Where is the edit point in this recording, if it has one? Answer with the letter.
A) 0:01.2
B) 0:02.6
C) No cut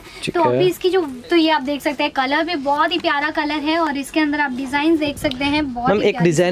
A